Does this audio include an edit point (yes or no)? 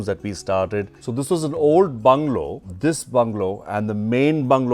no